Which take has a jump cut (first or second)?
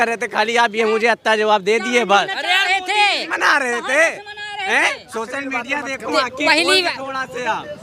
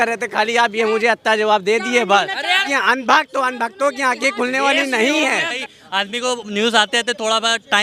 second